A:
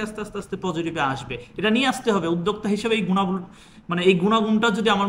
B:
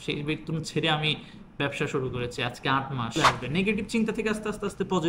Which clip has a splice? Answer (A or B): B